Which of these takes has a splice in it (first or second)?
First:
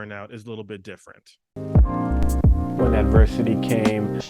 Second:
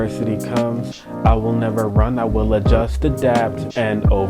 first